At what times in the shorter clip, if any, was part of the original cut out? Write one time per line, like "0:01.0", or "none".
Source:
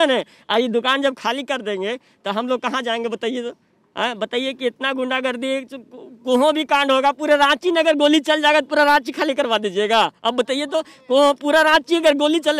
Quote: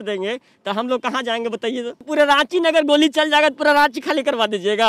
0:02.1